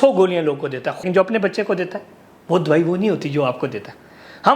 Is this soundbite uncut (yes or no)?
no